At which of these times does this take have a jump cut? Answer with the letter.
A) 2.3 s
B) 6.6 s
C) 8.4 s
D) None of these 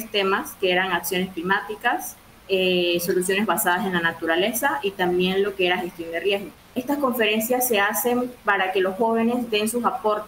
B